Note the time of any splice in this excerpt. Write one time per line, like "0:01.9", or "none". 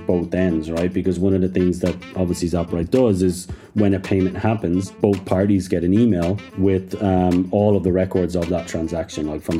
0:05.0
0:06.4